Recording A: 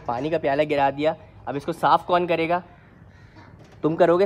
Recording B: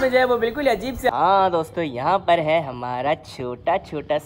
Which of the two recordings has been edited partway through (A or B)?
B